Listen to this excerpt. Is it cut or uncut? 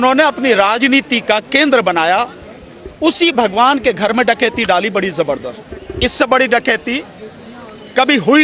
uncut